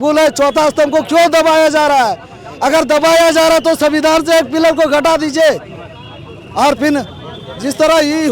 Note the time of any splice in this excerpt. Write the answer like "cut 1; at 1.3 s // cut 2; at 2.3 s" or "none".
none